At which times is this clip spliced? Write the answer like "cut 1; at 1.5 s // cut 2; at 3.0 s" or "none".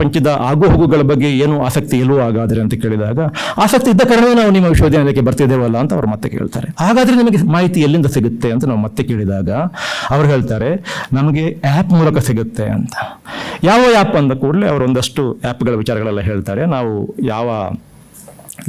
none